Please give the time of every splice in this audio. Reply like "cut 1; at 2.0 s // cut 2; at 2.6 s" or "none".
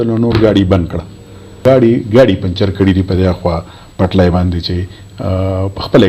cut 1; at 1.6 s